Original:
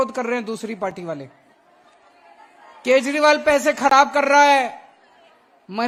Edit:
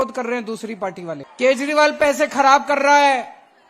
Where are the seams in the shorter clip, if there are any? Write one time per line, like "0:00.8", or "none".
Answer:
0:01.3